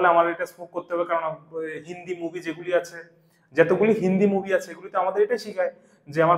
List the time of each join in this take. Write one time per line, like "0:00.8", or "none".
none